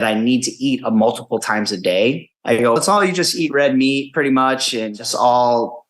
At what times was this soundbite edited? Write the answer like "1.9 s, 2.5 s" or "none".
2.3 s, 5.0 s

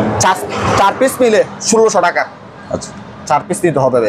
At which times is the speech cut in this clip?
none

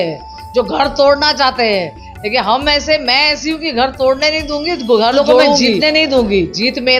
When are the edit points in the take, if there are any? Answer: 5.8 s

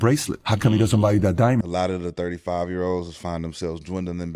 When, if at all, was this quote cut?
1.7 s

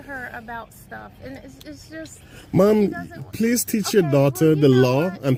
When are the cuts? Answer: none

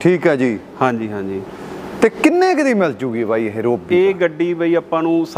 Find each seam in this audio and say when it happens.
none

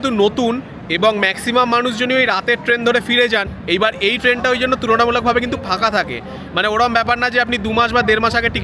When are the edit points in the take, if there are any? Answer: 3.5 s

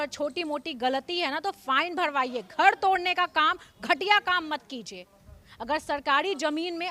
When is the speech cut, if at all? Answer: none

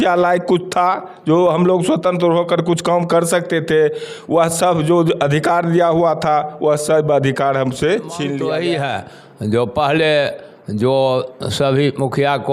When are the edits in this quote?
8.4 s

